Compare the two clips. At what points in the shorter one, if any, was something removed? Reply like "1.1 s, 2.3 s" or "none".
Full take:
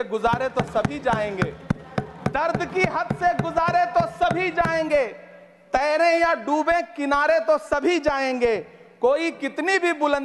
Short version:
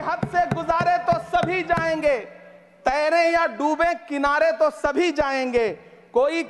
none